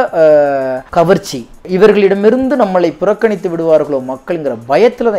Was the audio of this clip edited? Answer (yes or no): yes